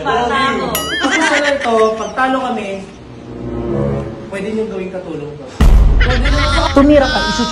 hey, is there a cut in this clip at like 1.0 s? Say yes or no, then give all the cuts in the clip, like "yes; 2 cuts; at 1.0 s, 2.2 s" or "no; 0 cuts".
yes; 3 cuts; at 1.0 s, 5.4 s, 6.7 s